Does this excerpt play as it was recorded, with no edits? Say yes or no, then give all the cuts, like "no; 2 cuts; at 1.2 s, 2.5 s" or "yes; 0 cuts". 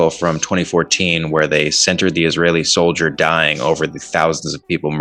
yes; 0 cuts